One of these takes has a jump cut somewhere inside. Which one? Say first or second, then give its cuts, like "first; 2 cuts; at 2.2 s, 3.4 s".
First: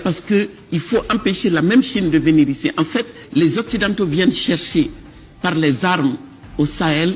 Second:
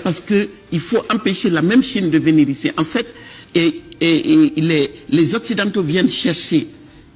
first; 1 cut; at 3.2 s